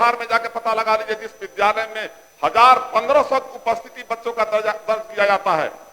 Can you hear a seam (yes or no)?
no